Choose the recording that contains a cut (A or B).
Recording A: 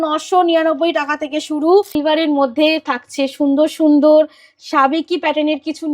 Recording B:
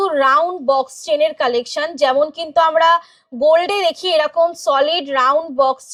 A